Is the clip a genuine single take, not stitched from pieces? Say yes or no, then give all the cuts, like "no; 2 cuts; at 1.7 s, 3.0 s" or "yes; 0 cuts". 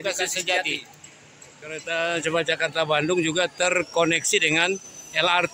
no; 1 cut; at 1.8 s